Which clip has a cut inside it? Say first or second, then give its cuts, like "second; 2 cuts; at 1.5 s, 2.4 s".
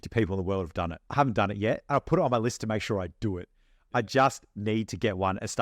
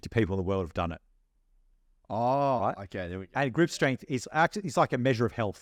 first; 2 cuts; at 1.0 s, 3.8 s